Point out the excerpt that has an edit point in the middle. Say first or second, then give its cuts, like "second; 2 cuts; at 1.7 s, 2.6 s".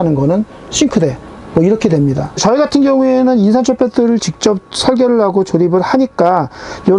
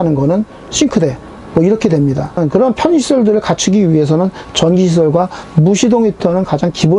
first; 1 cut; at 2.3 s